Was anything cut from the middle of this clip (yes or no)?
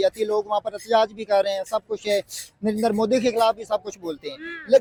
no